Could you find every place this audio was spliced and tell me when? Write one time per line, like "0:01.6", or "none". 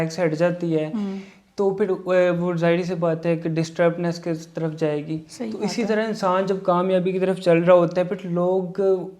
none